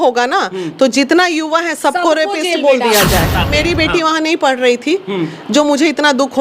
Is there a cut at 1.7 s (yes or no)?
no